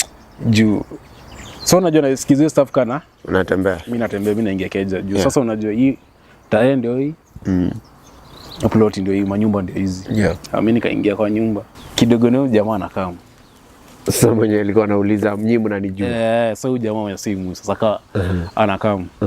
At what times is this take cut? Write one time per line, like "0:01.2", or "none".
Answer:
0:11.7